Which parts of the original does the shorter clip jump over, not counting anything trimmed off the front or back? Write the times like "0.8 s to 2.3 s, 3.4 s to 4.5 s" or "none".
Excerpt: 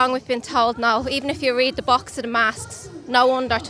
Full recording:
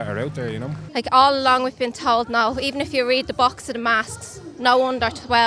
none